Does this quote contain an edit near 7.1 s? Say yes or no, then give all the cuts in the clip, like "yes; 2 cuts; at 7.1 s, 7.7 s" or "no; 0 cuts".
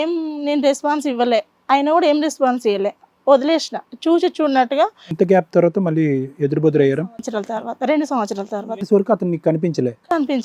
no; 0 cuts